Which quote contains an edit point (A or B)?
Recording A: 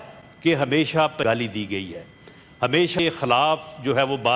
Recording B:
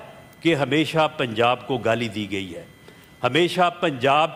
A